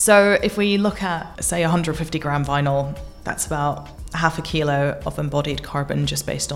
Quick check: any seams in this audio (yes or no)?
no